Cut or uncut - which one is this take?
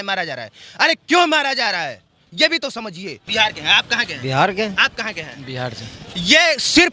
cut